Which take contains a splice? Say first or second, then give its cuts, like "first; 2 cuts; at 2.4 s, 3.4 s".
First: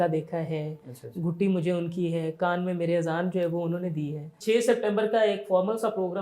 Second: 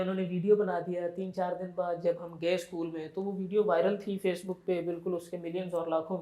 first; 1 cut; at 4.3 s